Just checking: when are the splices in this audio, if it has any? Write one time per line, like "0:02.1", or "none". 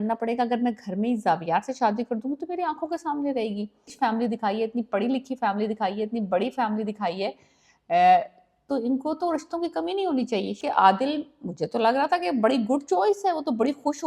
0:03.9
0:10.6

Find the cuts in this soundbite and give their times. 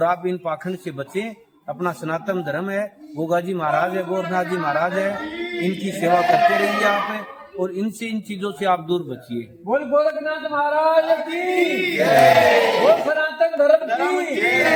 none

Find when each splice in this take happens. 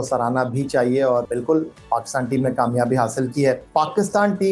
0:01.2
0:03.6

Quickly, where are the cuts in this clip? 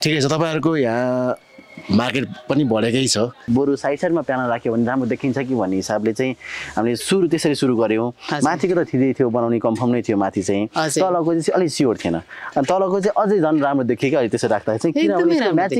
0:03.4

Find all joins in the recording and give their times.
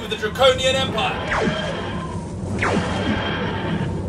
0:01.0

